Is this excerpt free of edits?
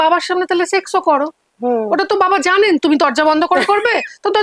yes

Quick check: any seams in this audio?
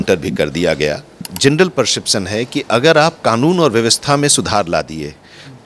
yes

